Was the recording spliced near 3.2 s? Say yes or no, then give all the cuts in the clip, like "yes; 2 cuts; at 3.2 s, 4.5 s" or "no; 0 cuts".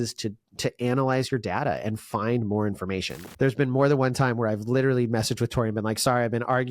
yes; 1 cut; at 3.2 s